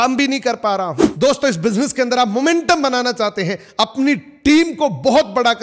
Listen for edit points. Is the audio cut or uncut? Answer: cut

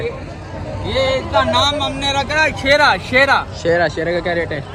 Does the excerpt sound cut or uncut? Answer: uncut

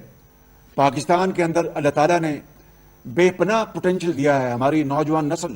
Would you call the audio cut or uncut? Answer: uncut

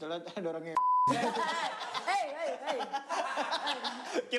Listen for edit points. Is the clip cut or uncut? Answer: uncut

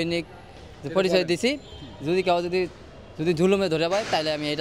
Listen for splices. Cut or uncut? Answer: uncut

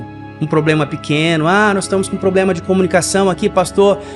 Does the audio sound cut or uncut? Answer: uncut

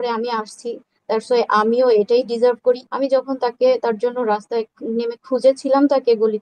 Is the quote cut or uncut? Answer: cut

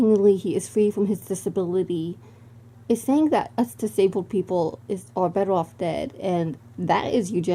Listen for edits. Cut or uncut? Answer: uncut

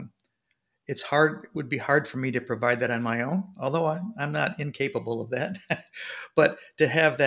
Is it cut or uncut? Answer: uncut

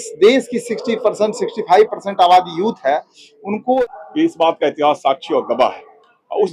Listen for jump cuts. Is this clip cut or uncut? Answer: cut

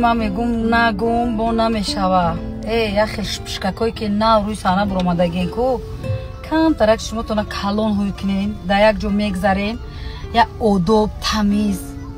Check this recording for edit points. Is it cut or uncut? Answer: uncut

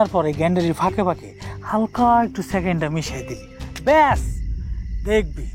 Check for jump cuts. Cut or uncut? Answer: uncut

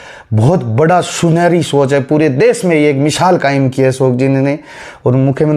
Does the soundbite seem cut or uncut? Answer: uncut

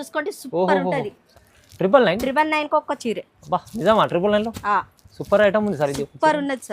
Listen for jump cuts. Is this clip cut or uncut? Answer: cut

